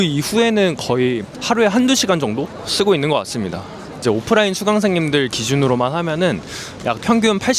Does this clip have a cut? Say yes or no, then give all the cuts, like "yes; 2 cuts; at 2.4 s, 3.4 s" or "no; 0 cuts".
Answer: yes; 1 cut; at 4.0 s